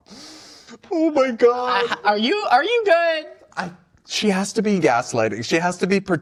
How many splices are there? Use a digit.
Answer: 0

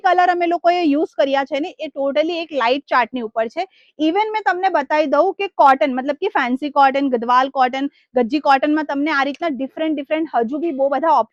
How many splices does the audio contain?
0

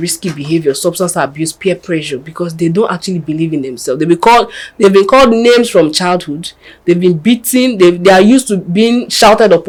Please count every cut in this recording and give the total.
0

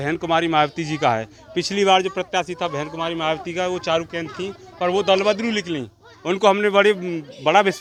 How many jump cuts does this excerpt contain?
0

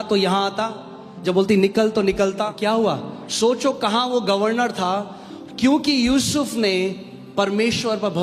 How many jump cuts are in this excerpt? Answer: 1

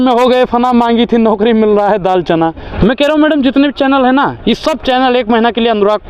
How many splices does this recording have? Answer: 1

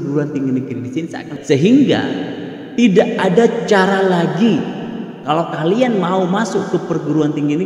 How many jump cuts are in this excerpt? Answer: 1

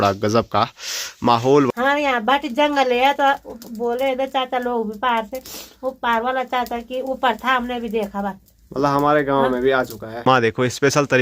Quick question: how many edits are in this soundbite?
2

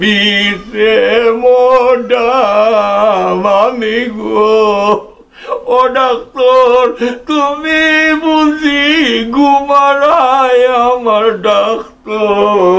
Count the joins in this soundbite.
0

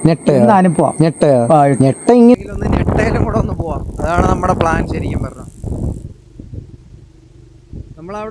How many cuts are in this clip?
1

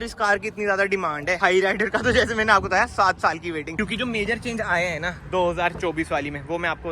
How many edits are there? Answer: 2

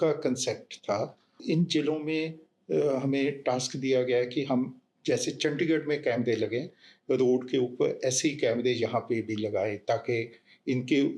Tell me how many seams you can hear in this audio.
1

